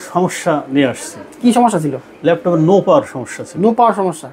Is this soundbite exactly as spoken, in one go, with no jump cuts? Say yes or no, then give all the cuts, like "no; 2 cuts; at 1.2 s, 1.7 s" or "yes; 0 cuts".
yes; 0 cuts